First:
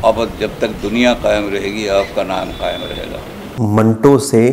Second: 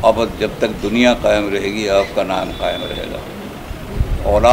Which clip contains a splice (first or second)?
first